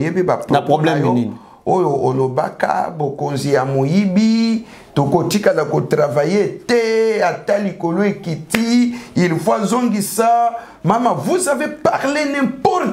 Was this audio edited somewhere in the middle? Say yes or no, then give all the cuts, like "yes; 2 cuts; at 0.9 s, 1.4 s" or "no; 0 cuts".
no; 0 cuts